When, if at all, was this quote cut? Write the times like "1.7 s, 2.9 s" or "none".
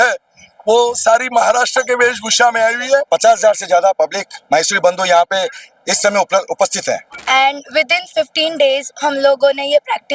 3.1 s, 7.1 s